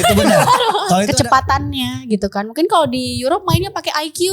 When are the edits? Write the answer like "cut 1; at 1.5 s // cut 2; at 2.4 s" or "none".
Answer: cut 1; at 1.1 s